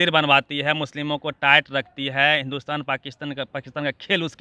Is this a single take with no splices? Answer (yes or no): yes